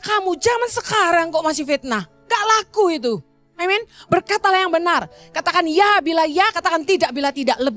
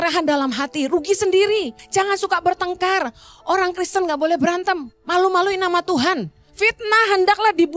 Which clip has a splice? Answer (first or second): second